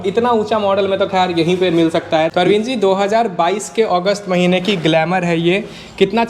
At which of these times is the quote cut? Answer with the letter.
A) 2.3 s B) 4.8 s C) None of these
A